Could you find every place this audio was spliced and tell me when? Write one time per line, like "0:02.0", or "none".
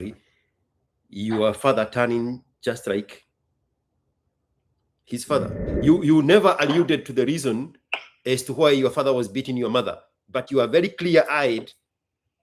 0:05.6

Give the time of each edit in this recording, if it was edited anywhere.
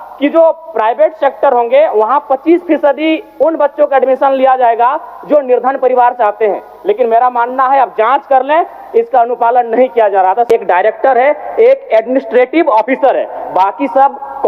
0:10.5

